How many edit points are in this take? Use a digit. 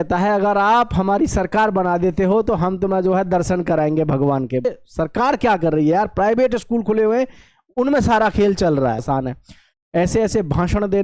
2